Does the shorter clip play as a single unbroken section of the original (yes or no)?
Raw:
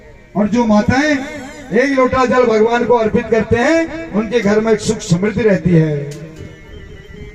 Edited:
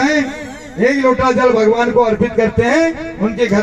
yes